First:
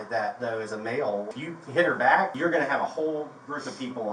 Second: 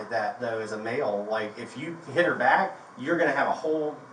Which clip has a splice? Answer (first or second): first